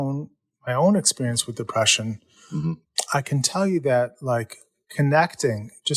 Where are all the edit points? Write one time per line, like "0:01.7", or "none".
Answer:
none